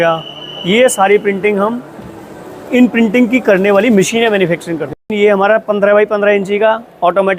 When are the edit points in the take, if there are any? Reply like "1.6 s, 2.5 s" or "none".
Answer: 5.0 s